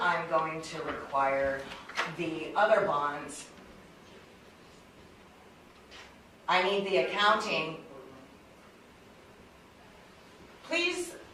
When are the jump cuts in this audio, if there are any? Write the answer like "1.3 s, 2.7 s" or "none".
none